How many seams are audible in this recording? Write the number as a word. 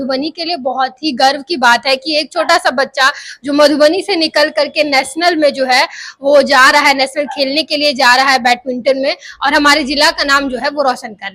zero